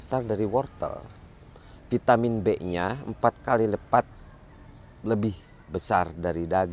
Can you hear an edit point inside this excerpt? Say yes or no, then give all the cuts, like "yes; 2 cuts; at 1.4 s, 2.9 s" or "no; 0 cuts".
no; 0 cuts